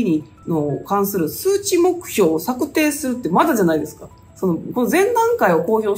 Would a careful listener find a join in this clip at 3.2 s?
no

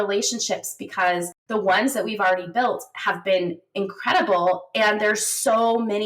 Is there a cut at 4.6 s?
no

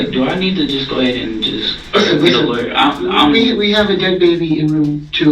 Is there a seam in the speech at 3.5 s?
no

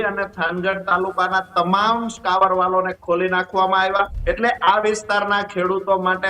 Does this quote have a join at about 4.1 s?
yes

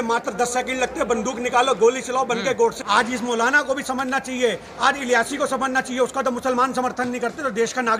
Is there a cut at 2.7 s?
yes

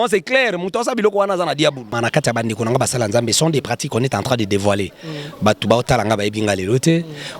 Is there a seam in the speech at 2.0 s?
yes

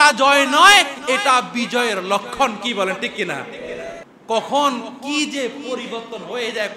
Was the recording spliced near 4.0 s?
yes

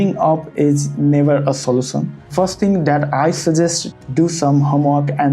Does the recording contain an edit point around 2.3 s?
yes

